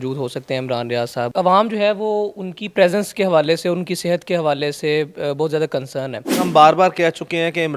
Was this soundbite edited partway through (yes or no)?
yes